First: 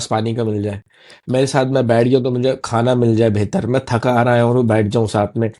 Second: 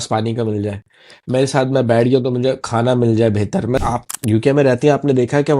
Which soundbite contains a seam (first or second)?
second